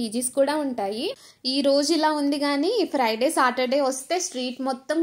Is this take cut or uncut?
cut